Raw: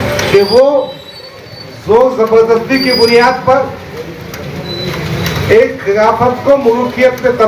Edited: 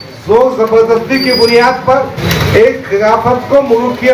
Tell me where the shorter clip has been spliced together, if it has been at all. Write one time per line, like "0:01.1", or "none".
0:02.2